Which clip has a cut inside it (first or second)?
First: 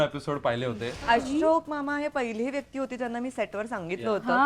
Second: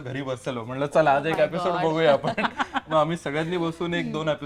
first